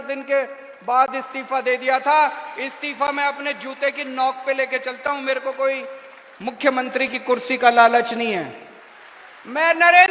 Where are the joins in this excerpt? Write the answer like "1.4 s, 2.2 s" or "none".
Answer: 8.6 s